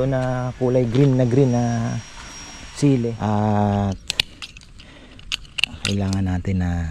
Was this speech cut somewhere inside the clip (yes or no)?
yes